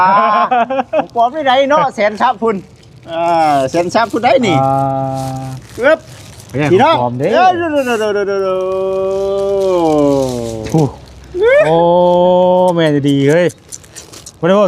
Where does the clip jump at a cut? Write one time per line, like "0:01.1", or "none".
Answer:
none